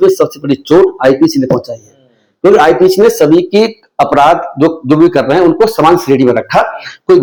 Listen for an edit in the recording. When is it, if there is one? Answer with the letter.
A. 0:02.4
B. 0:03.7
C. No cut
C